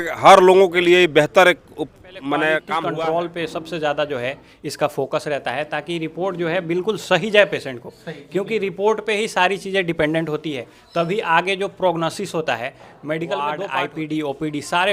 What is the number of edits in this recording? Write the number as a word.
two